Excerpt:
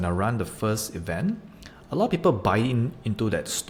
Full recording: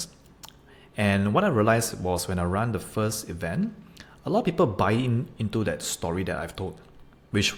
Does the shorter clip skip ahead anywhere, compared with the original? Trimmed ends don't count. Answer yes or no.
no